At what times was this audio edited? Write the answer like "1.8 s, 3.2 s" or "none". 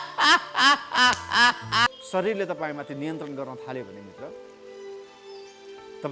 1.9 s